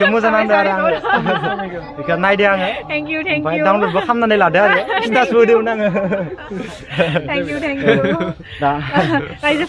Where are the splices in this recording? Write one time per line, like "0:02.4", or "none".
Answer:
none